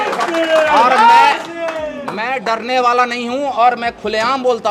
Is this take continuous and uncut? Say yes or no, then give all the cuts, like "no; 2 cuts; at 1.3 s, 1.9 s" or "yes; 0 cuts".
yes; 0 cuts